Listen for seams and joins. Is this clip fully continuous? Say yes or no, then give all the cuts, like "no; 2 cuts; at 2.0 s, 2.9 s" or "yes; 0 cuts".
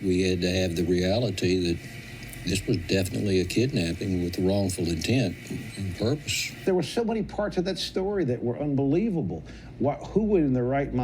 no; 1 cut; at 6.5 s